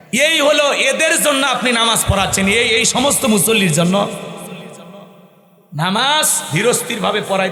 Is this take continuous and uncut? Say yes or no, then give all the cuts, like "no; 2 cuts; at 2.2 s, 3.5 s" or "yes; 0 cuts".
yes; 0 cuts